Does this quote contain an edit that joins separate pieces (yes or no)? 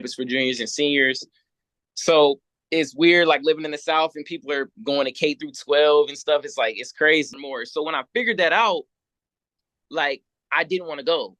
yes